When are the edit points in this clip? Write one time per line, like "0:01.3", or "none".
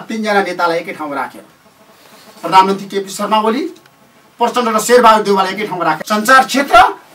0:06.0